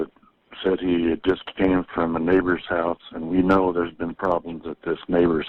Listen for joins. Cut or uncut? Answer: uncut